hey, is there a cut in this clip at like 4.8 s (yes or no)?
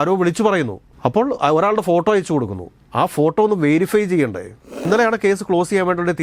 yes